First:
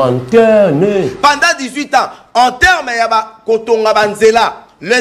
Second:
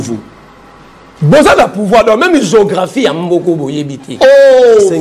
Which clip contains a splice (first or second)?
first